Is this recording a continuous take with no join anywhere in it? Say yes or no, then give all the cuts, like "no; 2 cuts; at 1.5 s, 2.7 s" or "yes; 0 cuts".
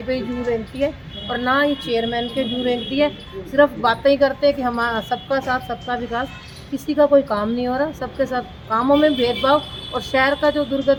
yes; 0 cuts